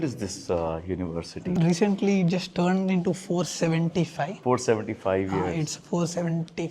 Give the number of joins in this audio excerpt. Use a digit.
1